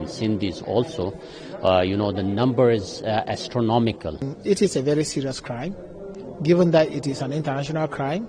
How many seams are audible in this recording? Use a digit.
1